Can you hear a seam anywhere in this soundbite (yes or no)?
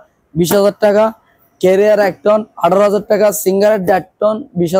no